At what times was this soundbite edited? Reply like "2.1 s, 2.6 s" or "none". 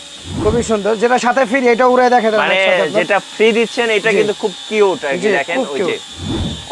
none